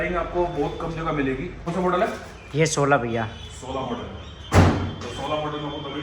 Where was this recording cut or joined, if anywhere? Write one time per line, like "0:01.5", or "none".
0:01.7